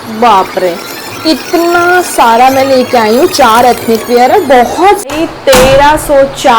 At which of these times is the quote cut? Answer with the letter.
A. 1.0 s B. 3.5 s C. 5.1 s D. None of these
C